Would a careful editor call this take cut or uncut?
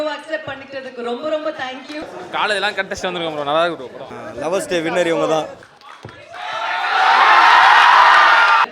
cut